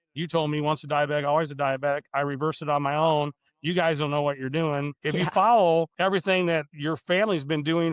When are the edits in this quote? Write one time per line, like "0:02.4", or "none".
0:04.9
0:05.9
0:06.7